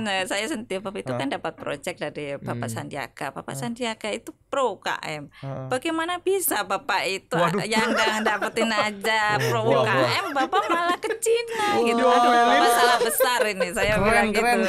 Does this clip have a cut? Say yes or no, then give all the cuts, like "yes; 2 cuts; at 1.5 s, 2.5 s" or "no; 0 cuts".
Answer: no; 0 cuts